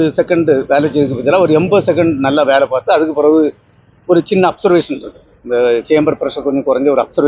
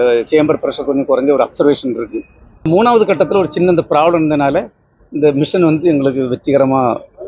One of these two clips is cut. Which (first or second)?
second